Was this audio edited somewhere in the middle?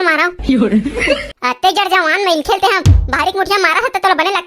no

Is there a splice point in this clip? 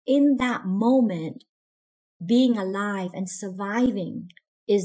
no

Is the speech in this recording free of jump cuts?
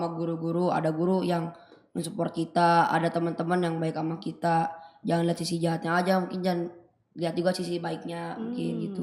yes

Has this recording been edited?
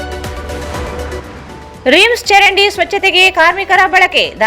yes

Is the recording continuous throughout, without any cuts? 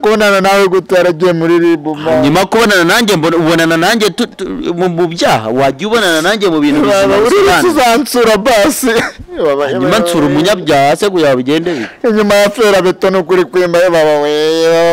yes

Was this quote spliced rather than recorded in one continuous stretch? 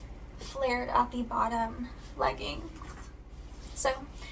no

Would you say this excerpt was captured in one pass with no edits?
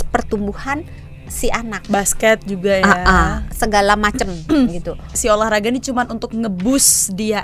no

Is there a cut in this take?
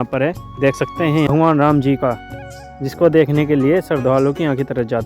yes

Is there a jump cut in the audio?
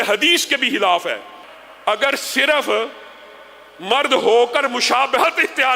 yes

